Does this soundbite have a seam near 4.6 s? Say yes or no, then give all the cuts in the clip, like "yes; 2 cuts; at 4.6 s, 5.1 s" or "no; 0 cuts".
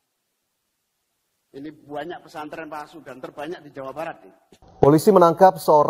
yes; 1 cut; at 4.6 s